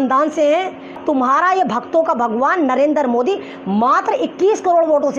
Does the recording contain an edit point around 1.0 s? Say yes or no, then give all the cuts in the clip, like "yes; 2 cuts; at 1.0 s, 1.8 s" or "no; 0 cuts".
yes; 1 cut; at 1.0 s